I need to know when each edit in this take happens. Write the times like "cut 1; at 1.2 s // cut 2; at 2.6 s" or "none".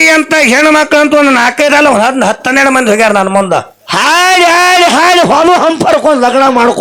none